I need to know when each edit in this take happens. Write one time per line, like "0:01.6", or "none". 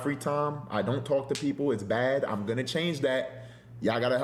none